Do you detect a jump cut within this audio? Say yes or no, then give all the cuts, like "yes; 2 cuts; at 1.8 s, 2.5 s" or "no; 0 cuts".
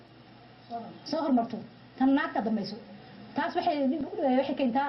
no; 0 cuts